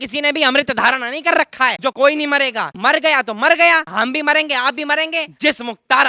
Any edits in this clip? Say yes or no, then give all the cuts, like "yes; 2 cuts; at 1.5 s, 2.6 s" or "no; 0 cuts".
yes; 4 cuts; at 1.9 s, 2.7 s, 3.9 s, 5.3 s